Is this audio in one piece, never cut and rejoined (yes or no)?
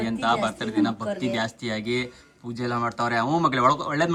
yes